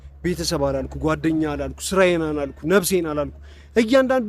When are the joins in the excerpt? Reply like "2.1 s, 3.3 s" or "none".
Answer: none